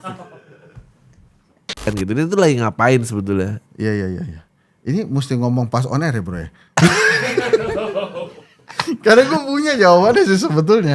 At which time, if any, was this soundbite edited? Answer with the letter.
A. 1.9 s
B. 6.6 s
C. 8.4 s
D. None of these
A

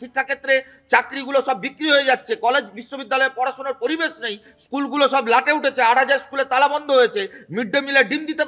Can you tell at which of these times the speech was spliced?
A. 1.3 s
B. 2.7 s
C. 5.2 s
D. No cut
D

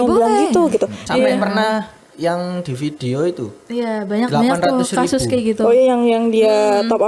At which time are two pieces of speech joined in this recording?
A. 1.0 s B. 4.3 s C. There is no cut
A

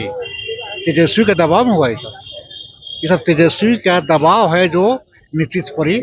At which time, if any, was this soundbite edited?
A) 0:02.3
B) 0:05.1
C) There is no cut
C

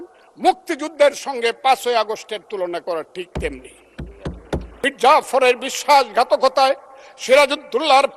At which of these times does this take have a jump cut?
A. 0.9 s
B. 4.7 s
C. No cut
B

